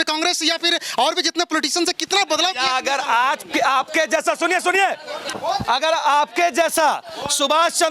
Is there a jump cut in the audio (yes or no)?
yes